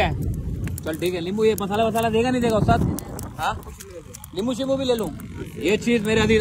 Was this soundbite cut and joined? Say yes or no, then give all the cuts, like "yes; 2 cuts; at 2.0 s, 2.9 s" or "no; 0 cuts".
no; 0 cuts